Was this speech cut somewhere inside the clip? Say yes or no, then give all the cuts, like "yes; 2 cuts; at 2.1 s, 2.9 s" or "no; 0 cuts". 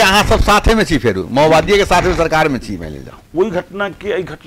yes; 1 cut; at 3.2 s